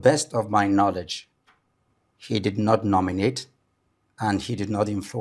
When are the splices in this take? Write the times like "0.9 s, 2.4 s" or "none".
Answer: none